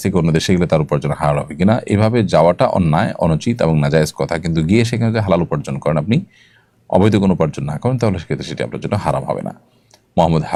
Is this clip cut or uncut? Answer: uncut